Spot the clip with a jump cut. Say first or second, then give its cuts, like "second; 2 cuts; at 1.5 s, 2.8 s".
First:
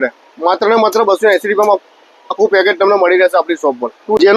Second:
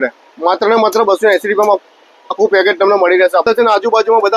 second; 1 cut; at 3.4 s